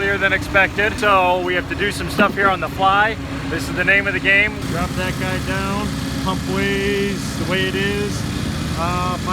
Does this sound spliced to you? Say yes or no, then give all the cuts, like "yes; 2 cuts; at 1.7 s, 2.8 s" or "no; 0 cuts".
yes; 2 cuts; at 1.0 s, 4.6 s